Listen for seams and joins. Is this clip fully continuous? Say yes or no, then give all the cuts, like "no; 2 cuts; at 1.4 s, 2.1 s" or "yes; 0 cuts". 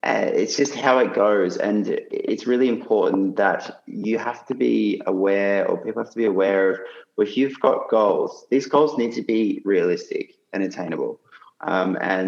yes; 0 cuts